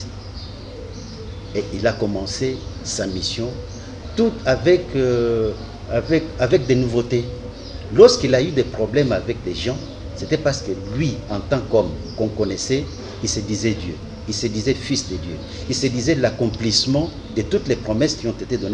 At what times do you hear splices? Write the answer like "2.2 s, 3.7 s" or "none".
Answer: none